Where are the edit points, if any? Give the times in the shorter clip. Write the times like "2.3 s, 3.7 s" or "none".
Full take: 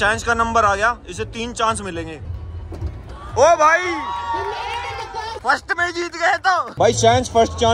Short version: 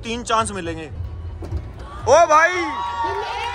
none